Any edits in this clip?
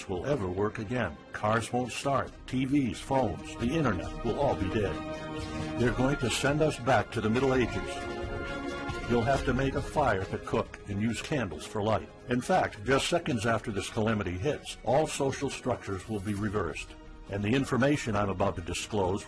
yes; 1 cut; at 1.5 s

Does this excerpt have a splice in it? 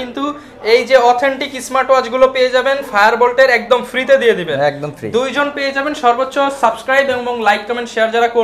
no; 0 cuts

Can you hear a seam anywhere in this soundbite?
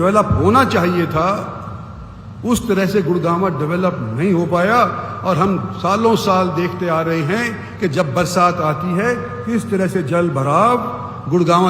no; 0 cuts

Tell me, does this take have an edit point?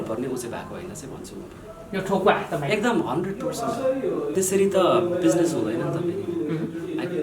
yes; 1 cut; at 4.3 s

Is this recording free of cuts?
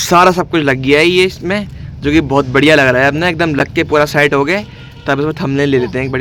yes; 0 cuts

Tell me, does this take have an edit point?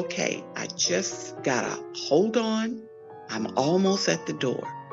yes; 2 cuts; at 1.2 s, 2.7 s

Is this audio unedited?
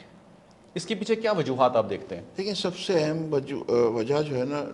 yes; 0 cuts

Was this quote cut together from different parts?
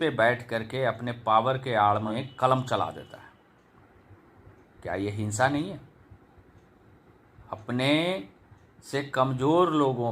yes; 1 cut; at 2.1 s

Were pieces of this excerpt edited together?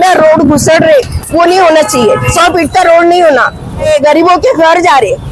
yes; 2 cuts; at 2.3 s, 3.9 s

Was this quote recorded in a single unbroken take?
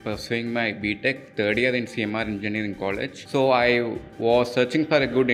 yes; 0 cuts

